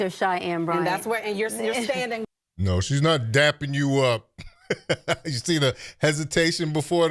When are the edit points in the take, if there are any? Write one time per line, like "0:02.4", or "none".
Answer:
0:02.2